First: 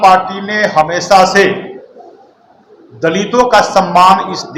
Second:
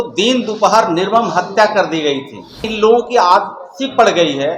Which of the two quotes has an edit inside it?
second; 1 cut; at 2.6 s

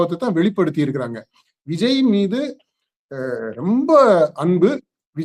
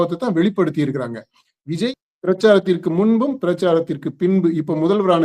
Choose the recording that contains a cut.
second; 1 cut; at 1.9 s

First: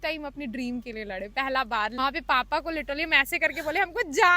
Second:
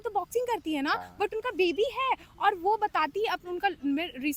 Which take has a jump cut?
first; 1 cut; at 2.0 s

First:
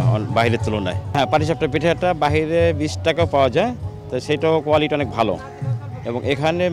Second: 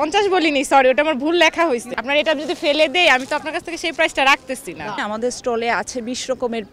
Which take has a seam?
second; 2 cuts; at 1.9 s, 5.0 s

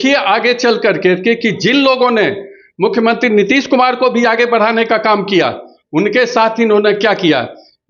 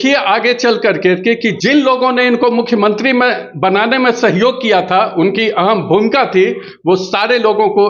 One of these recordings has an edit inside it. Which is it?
second; 1 cut; at 1.6 s

